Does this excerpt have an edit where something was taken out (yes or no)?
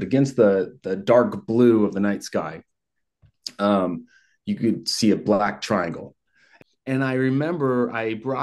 yes